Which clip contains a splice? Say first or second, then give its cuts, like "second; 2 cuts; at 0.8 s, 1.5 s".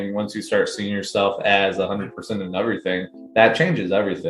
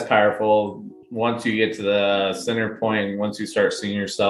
first; 1 cut; at 3.2 s